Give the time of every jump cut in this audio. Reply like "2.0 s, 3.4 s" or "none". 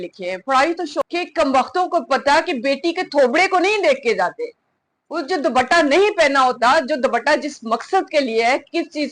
1.0 s